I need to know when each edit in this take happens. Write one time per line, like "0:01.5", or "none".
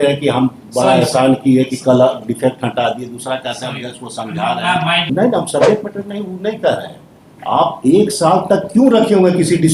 0:05.0